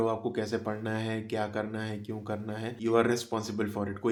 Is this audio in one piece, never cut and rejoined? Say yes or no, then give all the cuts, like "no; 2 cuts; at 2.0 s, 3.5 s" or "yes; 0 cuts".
yes; 0 cuts